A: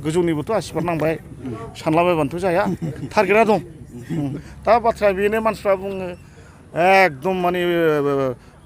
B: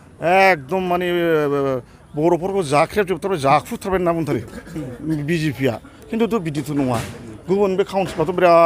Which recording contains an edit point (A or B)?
A